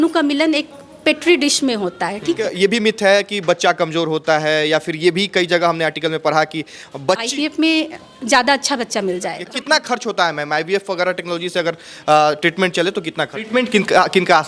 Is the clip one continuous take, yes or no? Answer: no